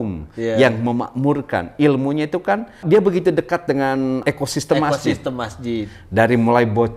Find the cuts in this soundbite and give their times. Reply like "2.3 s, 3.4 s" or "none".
2.8 s, 4.2 s